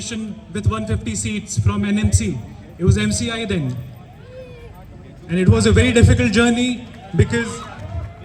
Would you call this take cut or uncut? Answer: uncut